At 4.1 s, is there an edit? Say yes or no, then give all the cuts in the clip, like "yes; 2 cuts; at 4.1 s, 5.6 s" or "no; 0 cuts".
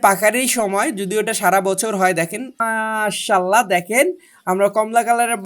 no; 1 cut; at 2.6 s